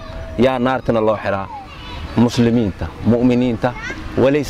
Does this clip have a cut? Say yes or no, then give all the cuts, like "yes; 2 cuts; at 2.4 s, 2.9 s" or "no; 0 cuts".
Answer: no; 0 cuts